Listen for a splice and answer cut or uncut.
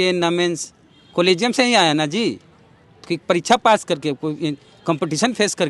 uncut